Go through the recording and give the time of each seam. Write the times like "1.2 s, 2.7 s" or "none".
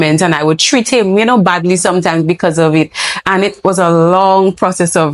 none

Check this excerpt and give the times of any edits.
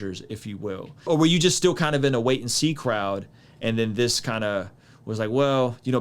1.1 s

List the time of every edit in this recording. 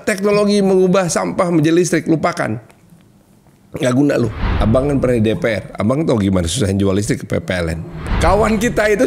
4.4 s, 8.0 s

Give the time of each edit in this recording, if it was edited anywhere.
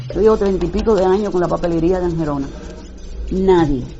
none

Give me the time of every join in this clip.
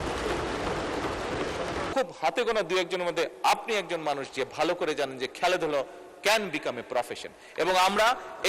1.9 s

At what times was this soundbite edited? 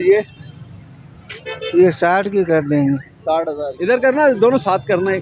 3.7 s

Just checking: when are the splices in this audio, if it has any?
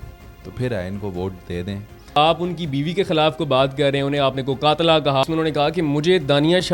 2.2 s, 5.2 s

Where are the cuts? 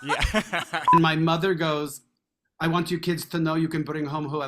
0.9 s

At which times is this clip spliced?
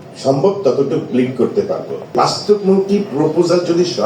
2.1 s

